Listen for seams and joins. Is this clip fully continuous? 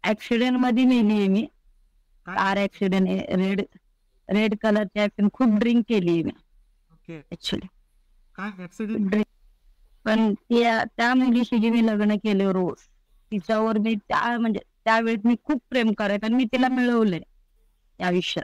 no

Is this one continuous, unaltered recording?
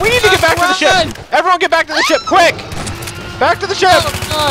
yes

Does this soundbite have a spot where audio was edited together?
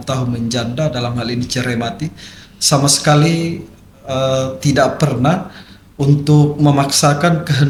no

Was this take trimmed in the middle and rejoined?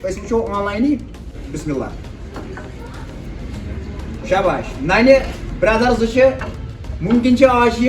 yes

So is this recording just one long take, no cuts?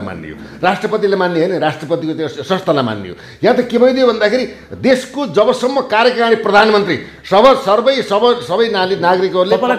yes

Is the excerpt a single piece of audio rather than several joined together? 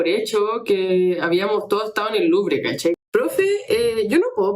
no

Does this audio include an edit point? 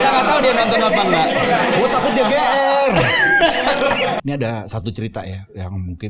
yes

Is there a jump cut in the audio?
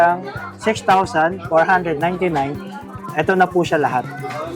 no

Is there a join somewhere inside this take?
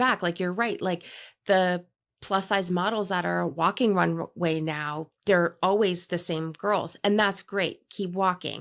no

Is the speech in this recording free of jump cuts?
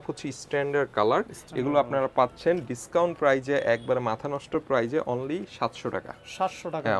yes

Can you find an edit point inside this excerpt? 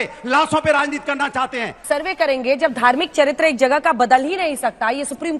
yes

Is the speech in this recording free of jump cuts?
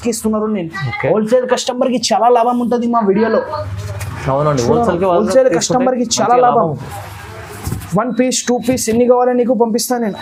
yes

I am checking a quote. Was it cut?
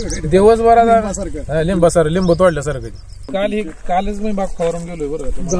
yes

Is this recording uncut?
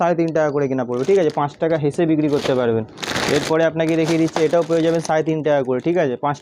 yes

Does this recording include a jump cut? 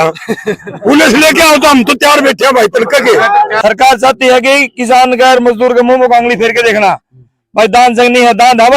yes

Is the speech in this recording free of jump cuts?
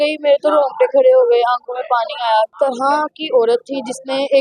no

